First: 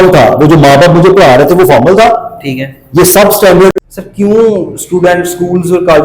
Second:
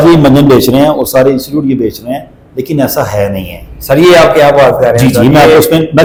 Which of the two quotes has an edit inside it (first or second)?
first